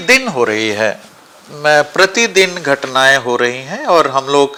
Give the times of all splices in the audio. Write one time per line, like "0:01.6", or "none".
none